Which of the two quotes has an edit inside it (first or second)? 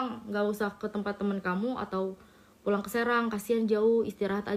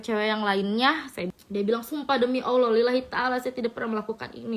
second